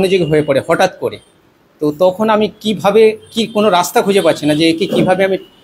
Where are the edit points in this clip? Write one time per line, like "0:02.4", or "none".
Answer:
none